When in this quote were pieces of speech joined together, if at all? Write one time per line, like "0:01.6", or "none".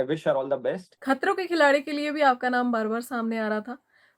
0:00.9